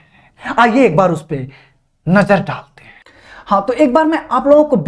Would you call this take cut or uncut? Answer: uncut